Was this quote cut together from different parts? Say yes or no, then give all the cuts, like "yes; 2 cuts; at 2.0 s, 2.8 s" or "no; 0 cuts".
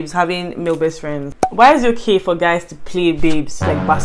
yes; 1 cut; at 1.4 s